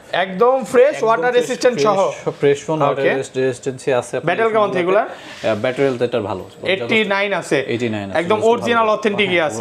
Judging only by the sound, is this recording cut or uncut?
uncut